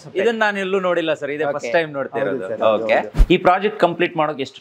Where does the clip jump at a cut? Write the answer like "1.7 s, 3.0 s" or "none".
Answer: 3.2 s